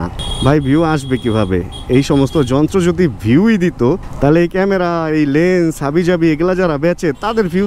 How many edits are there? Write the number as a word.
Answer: zero